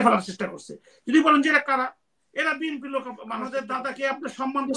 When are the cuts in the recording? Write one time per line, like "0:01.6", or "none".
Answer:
0:03.5

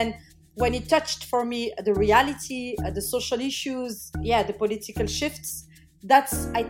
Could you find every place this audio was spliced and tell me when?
none

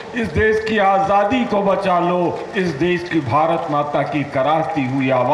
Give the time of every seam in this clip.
none

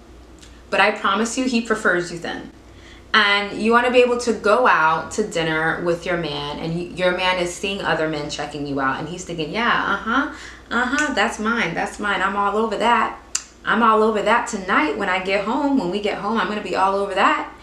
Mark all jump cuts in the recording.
none

